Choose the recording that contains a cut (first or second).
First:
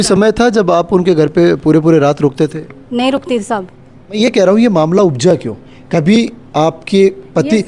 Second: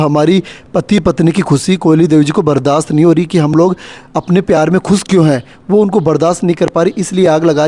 first